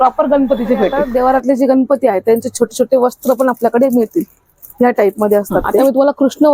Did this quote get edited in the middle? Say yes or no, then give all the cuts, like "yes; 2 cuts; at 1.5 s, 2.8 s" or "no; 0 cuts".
yes; 2 cuts; at 1.0 s, 5.8 s